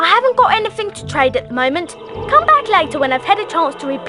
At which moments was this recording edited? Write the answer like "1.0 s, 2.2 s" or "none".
none